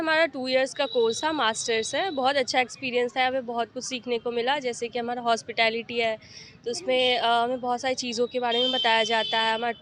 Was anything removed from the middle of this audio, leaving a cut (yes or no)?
no